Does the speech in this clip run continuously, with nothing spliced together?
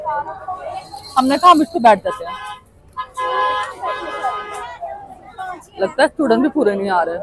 yes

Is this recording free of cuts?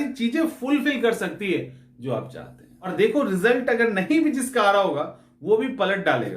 no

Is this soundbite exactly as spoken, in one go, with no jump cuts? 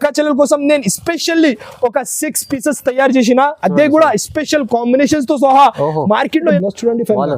no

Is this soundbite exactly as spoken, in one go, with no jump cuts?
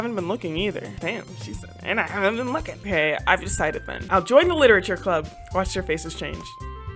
no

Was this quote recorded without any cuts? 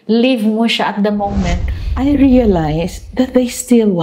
no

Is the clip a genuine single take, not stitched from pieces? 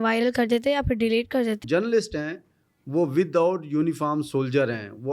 no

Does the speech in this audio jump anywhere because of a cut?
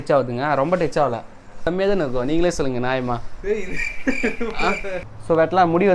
yes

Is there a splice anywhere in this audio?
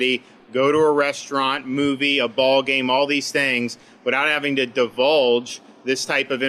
no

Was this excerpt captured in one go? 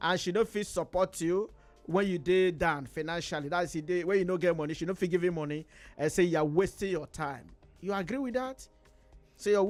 yes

